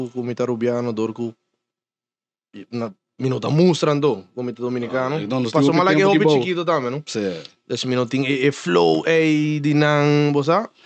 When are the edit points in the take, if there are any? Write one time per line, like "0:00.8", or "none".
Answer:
none